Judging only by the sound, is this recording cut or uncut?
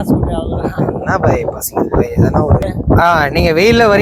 cut